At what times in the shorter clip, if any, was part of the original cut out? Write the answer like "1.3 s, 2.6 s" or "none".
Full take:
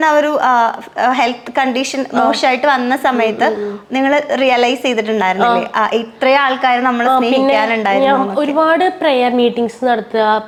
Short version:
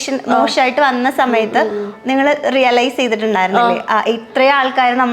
none

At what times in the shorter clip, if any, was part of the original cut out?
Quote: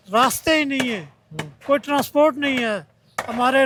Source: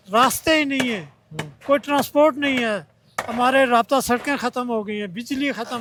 none

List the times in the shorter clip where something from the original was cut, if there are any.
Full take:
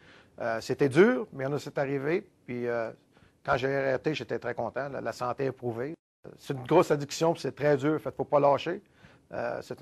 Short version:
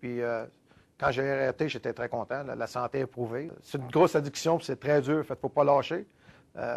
3.6 s

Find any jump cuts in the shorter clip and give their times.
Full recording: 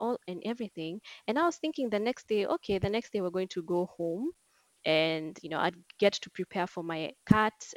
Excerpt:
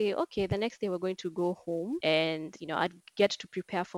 2.0 s

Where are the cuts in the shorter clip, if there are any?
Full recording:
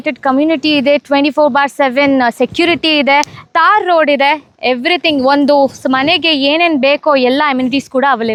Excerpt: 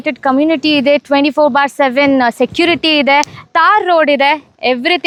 none

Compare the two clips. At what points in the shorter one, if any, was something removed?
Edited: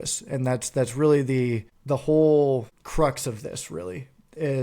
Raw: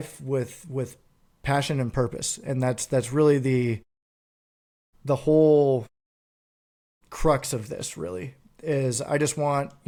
1.7 s, 2.8 s

